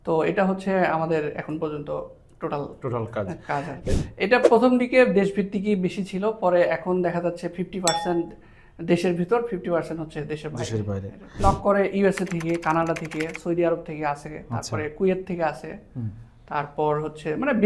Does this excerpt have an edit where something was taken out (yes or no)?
yes